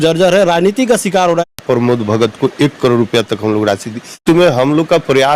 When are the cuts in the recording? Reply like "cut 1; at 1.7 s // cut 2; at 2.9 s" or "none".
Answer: cut 1; at 1.5 s // cut 2; at 4.2 s